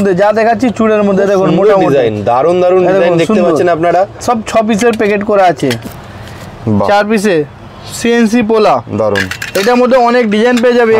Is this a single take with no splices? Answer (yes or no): no